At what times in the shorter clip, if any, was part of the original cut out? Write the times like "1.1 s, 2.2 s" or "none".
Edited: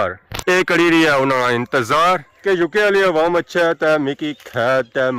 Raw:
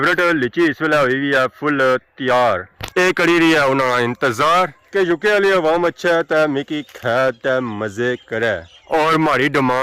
none